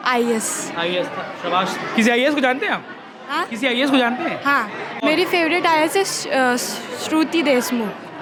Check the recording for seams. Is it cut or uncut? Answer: uncut